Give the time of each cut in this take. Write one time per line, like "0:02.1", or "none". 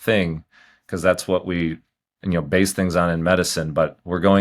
none